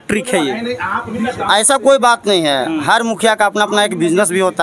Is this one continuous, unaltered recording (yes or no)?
yes